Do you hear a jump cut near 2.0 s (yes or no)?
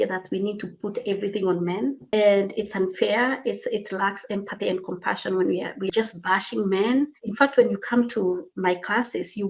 yes